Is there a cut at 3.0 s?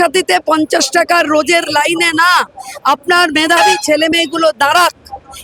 no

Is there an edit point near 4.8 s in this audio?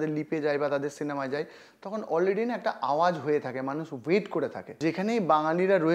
yes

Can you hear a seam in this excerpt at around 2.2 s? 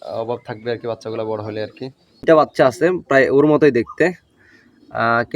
yes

